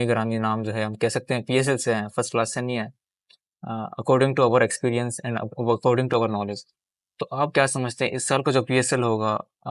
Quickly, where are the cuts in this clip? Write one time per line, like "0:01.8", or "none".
none